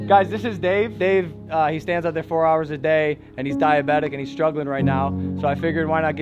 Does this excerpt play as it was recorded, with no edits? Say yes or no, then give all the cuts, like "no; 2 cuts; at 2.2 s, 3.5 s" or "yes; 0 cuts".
no; 1 cut; at 0.9 s